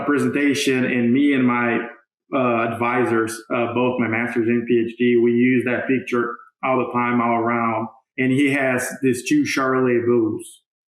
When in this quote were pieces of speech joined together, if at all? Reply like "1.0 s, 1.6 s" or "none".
8.0 s